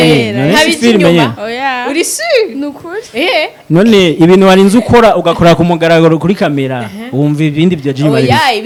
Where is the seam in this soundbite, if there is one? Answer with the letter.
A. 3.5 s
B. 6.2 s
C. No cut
C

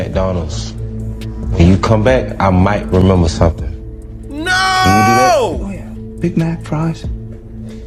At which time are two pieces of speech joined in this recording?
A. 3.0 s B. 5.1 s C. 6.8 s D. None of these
D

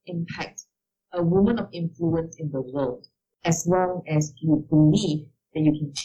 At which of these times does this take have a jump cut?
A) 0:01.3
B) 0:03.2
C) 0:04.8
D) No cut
B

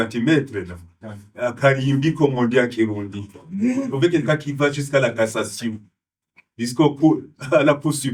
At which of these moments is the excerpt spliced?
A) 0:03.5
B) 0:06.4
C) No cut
C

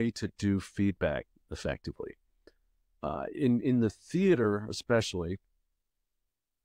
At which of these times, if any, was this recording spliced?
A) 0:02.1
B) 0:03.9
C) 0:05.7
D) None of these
D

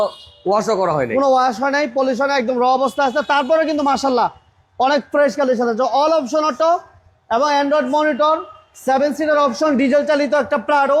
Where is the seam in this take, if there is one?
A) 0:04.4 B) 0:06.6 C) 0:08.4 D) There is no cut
D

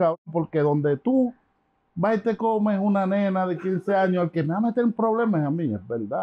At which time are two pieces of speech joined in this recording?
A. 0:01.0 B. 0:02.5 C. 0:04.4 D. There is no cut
D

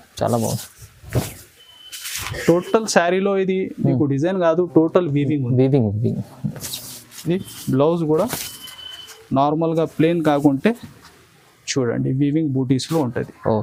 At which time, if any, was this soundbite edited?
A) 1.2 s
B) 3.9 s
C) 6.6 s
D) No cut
D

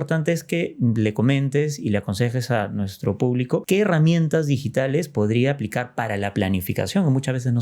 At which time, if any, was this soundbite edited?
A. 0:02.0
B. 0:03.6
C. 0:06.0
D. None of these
B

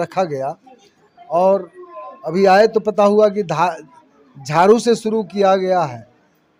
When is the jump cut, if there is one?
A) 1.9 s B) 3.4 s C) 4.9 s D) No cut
D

